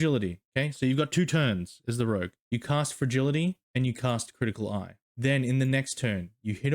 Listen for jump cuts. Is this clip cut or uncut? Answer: cut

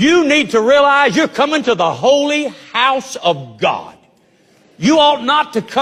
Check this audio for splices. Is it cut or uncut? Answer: uncut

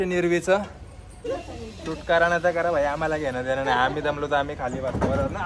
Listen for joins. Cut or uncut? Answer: cut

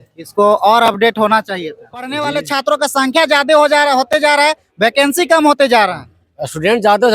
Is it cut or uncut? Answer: cut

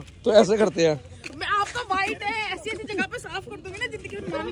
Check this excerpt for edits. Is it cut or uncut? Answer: uncut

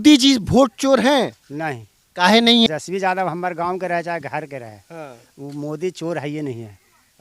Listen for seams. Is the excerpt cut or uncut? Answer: cut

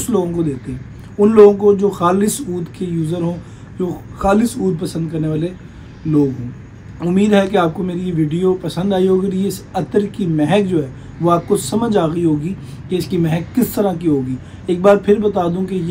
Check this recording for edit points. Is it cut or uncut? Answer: uncut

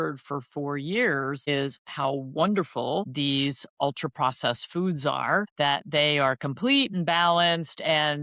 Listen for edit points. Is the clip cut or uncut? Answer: cut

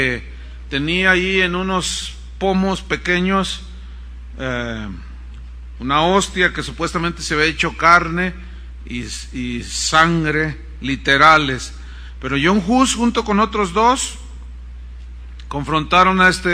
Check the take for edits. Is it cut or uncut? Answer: uncut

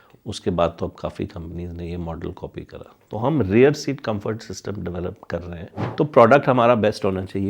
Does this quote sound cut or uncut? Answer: cut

